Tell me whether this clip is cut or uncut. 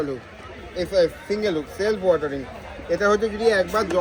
uncut